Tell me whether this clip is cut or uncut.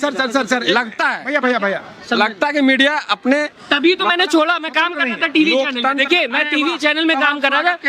uncut